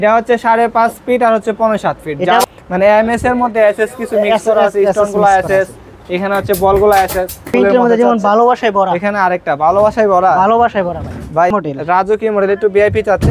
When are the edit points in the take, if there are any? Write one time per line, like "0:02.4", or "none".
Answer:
0:02.4
0:07.4
0:11.5